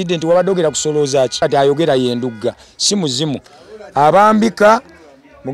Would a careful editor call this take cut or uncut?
cut